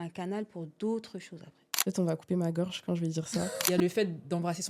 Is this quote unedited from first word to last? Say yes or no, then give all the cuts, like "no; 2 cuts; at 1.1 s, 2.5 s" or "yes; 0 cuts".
no; 2 cuts; at 1.7 s, 3.6 s